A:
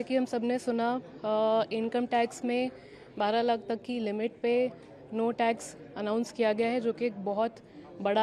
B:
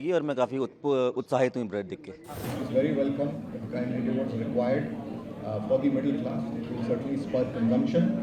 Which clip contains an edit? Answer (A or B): B